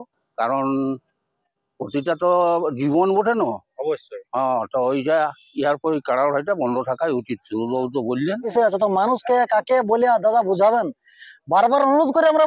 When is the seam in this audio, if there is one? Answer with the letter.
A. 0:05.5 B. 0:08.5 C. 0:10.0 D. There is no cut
B